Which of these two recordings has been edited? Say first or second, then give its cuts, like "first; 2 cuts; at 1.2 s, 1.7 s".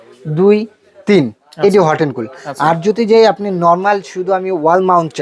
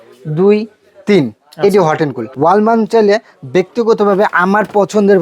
second; 1 cut; at 2.2 s